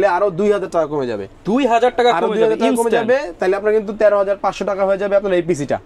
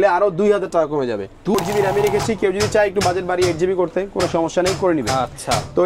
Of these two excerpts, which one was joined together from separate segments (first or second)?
second